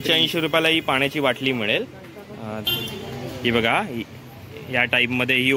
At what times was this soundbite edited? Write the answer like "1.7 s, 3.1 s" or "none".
none